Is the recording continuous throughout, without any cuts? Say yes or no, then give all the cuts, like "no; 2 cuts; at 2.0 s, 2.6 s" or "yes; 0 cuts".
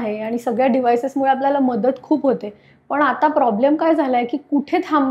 yes; 0 cuts